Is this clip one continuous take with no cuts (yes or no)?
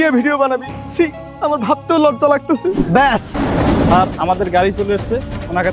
no